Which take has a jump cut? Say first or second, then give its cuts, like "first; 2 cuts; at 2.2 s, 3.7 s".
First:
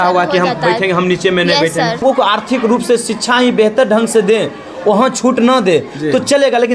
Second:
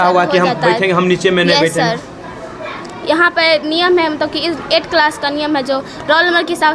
first; 1 cut; at 2.0 s